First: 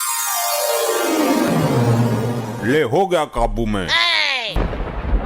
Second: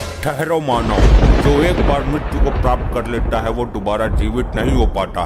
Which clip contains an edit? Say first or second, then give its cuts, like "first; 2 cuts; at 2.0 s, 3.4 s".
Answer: first; 2 cuts; at 1.5 s, 4.6 s